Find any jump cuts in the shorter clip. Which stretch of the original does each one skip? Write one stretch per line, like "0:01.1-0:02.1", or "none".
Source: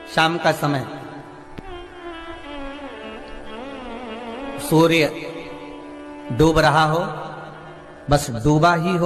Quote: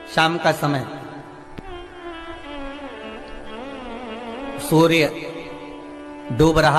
none